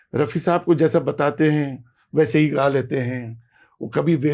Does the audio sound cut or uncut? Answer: uncut